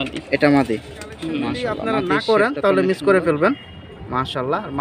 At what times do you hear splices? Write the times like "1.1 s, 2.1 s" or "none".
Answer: 2.5 s